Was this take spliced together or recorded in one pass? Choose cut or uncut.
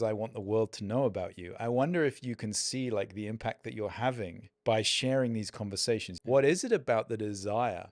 cut